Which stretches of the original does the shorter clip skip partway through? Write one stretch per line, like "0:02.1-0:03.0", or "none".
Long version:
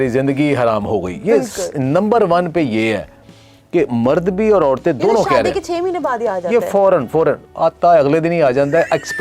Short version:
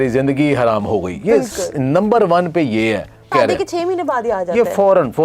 0:03.3-0:05.3